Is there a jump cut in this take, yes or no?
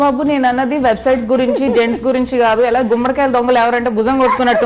no